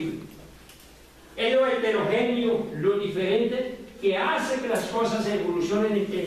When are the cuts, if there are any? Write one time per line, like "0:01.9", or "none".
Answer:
none